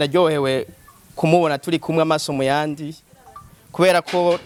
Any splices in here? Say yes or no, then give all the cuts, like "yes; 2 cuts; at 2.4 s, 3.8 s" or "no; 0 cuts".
no; 0 cuts